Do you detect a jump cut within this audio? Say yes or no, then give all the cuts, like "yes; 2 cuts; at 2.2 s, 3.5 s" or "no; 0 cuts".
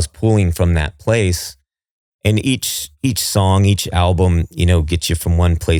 no; 0 cuts